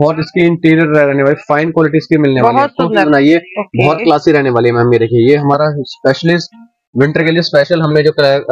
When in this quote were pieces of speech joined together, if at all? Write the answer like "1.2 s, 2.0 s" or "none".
3.0 s